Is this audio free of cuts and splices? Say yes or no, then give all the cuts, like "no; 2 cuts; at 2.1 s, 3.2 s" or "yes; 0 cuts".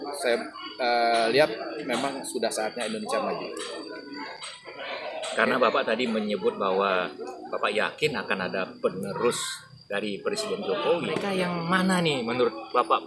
no; 1 cut; at 11.2 s